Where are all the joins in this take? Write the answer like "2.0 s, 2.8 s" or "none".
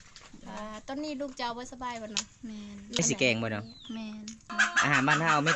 3.0 s, 4.5 s